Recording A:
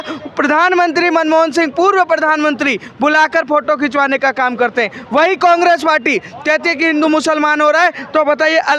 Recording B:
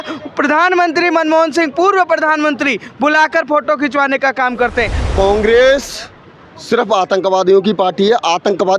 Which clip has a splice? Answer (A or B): B